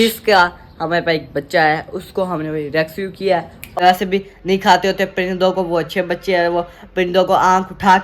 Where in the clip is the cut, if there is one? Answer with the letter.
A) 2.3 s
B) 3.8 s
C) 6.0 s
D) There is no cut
B